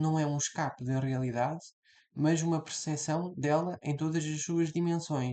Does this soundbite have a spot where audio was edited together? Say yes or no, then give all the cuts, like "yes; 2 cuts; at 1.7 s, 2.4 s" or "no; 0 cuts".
no; 0 cuts